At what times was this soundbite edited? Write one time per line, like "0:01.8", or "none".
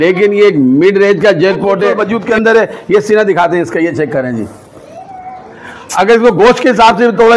0:02.0